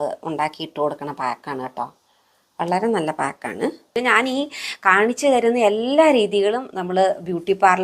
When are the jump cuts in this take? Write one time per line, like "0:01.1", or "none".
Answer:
0:03.9